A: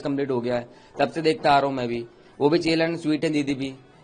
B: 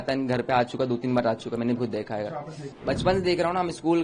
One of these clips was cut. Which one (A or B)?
B